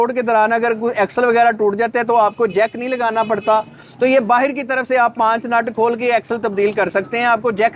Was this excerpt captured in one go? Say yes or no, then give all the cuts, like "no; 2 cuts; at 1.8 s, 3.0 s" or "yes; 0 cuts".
yes; 0 cuts